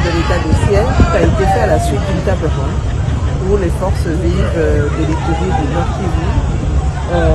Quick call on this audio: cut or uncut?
uncut